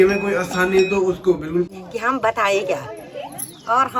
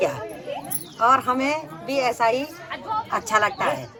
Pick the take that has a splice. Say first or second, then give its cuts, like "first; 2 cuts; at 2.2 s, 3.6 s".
first; 1 cut; at 1.8 s